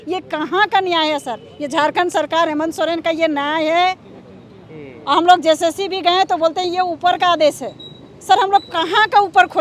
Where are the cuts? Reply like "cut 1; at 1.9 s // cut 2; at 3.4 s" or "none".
none